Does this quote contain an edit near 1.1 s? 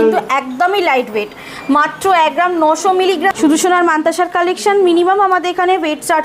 no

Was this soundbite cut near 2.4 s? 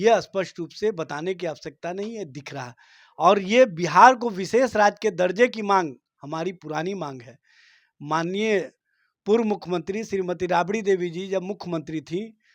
no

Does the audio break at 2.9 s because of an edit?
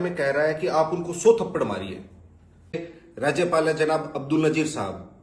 yes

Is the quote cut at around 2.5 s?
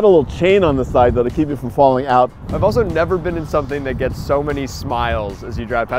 yes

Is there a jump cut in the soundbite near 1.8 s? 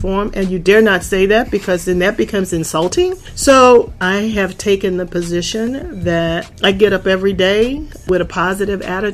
no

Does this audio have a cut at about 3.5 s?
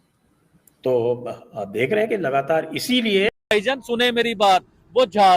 yes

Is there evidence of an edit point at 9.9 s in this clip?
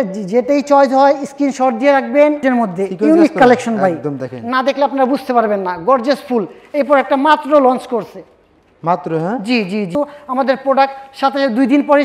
yes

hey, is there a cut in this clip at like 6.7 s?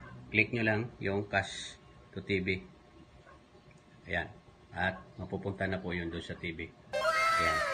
yes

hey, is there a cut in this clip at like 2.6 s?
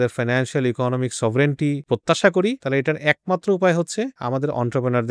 yes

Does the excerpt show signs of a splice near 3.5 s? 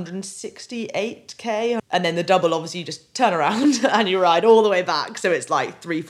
no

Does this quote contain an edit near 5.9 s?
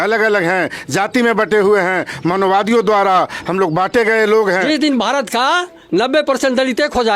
no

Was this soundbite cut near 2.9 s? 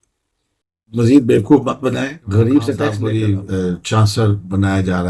yes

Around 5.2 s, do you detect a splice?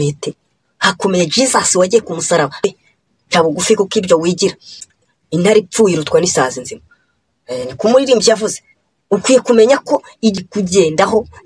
no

